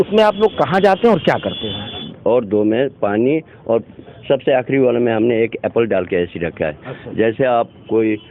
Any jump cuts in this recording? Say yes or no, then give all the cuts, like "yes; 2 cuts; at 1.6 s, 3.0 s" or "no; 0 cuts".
yes; 1 cut; at 2.1 s